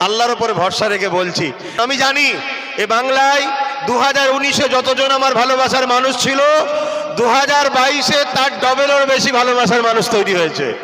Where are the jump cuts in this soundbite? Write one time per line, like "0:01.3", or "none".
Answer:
0:01.8